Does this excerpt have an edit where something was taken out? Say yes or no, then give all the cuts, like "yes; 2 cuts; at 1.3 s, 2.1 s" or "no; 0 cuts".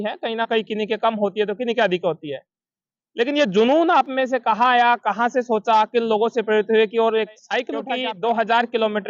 yes; 1 cut; at 7.9 s